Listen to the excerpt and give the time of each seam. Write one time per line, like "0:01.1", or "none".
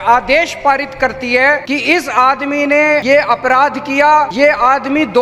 0:01.6
0:03.0
0:04.3